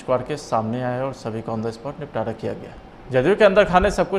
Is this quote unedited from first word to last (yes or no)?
no